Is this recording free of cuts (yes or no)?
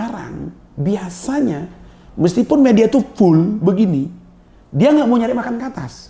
yes